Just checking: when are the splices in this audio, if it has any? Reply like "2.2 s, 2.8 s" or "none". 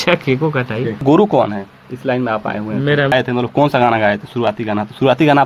1.0 s, 3.1 s